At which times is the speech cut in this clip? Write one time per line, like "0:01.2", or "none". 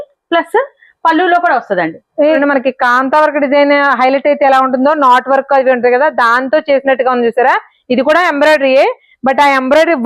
0:02.4